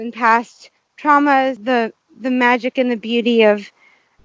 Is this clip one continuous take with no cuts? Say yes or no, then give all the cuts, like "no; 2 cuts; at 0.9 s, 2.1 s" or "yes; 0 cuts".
no; 1 cut; at 1.6 s